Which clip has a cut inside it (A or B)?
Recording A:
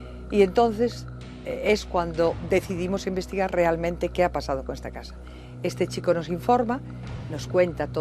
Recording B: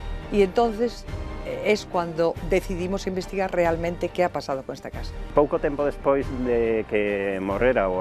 B